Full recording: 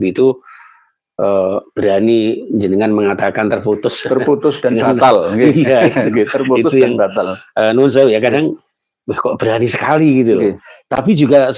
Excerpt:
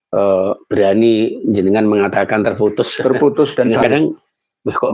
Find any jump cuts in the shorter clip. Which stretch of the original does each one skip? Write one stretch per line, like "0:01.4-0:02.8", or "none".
0:04.9-0:08.3